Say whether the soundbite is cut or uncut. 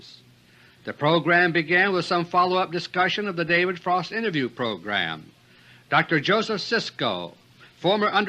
uncut